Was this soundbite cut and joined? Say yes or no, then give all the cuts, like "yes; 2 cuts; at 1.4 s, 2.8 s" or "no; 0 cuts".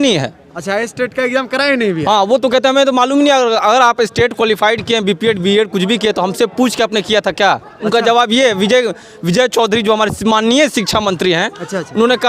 no; 0 cuts